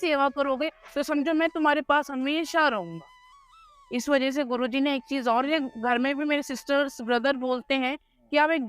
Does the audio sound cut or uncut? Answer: cut